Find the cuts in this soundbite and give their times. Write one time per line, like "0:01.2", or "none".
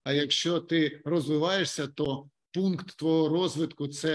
none